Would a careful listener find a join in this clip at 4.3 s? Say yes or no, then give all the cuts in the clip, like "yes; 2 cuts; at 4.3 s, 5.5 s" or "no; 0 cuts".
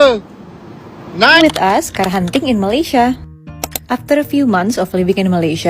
no; 1 cut; at 1.4 s